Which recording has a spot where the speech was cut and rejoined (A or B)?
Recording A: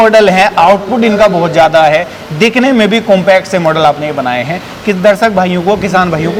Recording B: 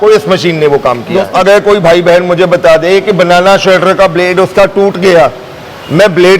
B